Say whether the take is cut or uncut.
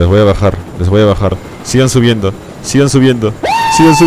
cut